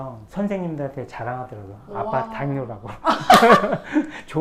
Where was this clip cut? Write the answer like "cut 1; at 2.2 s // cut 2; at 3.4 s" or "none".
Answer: none